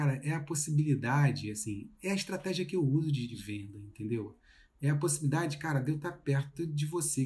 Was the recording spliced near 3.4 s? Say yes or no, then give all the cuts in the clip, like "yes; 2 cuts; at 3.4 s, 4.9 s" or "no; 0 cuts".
yes; 1 cut; at 3.4 s